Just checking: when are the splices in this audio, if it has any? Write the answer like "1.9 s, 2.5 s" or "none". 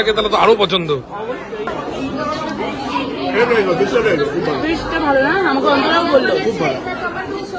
none

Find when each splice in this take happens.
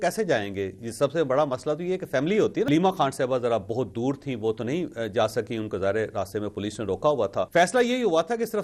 2.7 s, 7.5 s

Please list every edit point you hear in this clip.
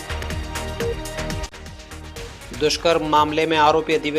1.4 s

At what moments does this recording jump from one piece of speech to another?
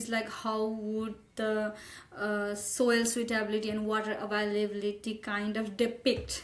none

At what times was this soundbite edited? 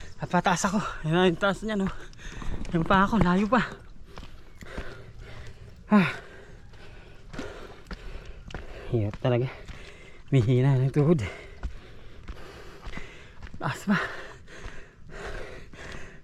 none

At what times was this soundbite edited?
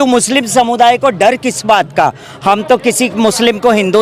none

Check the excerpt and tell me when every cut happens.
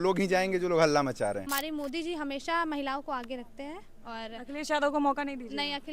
1.5 s

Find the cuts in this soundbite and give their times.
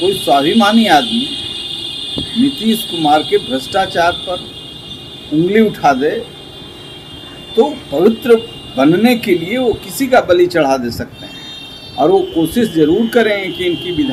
none

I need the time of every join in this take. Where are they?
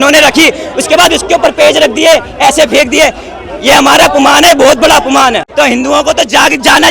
5.4 s

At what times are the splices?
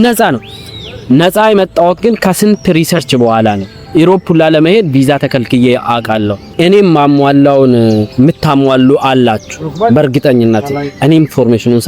6.5 s

